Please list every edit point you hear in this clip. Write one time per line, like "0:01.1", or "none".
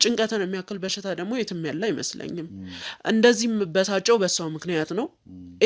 none